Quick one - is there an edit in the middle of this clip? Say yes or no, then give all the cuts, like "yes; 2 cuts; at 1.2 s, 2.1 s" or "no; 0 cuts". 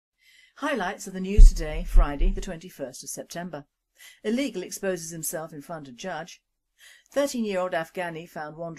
no; 0 cuts